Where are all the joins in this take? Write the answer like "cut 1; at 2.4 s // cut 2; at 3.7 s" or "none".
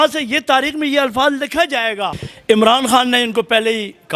cut 1; at 2.3 s